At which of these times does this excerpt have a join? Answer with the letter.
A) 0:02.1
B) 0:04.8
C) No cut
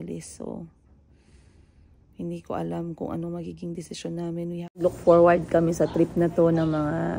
B